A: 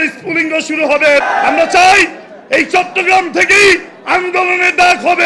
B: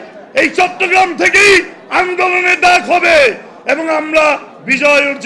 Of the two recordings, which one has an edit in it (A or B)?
A